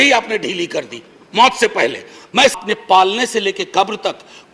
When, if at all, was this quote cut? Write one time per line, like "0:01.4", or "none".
0:02.6